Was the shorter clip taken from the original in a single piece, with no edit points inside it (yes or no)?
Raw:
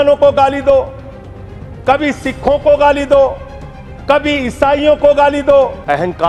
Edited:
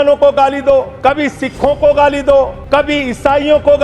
no